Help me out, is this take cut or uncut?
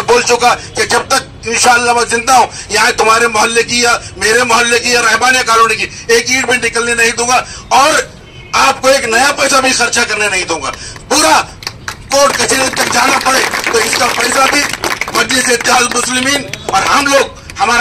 uncut